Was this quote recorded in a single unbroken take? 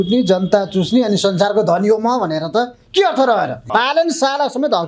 no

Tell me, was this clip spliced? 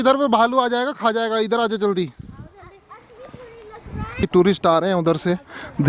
no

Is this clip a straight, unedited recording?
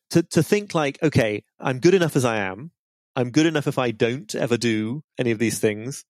no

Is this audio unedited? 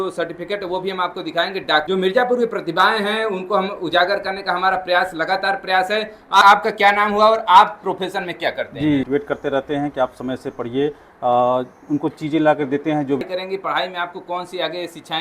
no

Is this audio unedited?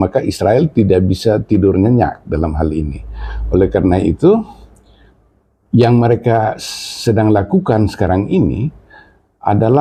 yes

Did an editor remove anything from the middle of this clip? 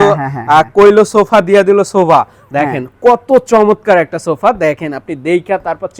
no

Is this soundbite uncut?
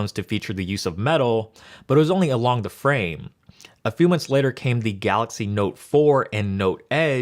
no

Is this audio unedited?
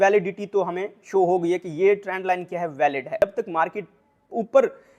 no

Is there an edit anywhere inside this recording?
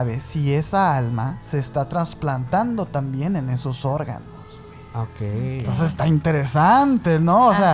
no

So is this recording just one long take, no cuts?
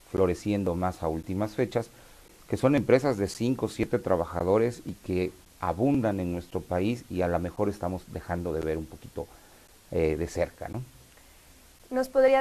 no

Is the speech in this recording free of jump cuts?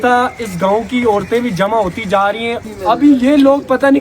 no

